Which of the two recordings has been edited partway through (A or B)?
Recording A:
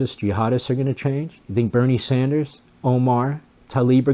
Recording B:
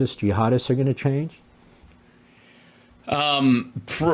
A